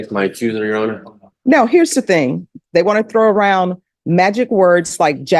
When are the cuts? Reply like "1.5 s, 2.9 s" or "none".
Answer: 2.5 s